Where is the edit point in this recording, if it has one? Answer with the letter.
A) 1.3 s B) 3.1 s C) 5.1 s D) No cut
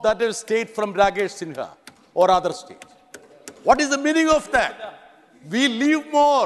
D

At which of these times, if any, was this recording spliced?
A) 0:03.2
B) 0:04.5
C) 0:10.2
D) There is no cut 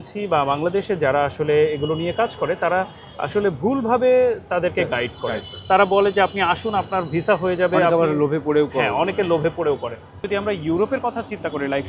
C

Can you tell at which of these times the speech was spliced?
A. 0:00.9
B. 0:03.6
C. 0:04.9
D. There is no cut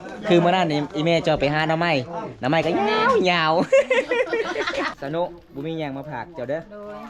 C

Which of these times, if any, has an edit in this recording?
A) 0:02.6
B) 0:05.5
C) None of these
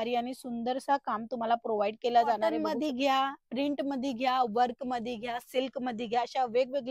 A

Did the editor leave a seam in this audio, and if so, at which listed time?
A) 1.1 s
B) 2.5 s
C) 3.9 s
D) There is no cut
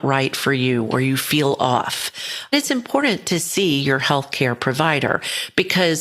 B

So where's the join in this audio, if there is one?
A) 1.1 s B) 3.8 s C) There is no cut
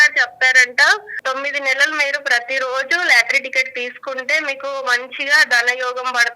A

